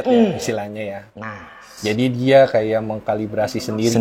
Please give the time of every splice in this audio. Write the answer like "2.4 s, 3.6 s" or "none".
none